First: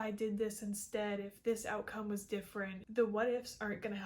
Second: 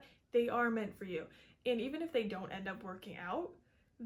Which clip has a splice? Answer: first; 1 cut; at 2.8 s

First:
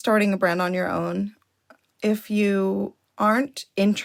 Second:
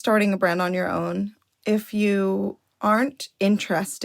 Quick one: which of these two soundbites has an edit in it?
second; 1 cut; at 1.4 s

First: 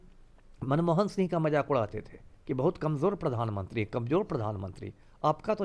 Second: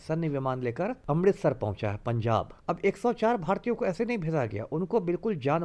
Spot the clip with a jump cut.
second; 2 cuts; at 1.0 s, 2.5 s

